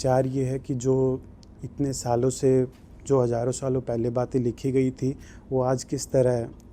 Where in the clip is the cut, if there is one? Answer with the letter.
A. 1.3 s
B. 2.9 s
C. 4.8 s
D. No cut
D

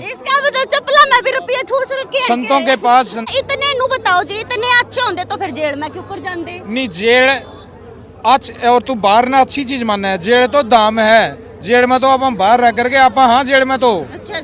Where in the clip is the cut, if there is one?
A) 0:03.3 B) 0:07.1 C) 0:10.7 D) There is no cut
A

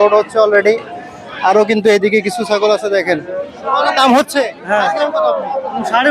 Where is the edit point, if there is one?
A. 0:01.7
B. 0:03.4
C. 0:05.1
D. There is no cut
B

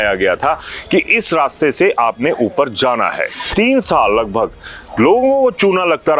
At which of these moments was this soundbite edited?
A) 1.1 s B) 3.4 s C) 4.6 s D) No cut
B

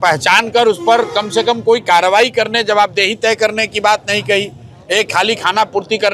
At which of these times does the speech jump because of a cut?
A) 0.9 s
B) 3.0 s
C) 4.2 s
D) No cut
D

